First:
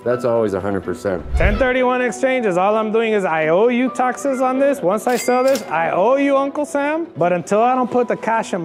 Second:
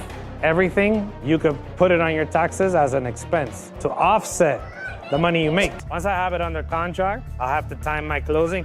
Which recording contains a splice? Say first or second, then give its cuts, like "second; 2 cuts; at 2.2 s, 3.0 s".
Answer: second; 1 cut; at 5.8 s